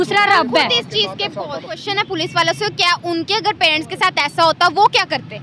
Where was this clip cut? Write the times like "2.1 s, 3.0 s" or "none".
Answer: 1.8 s